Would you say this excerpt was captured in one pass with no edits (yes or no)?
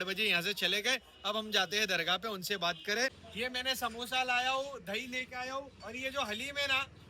no